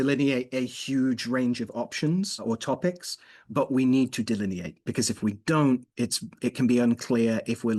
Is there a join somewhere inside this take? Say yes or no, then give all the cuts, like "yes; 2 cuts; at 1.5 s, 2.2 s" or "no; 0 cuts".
yes; 2 cuts; at 2.4 s, 4.8 s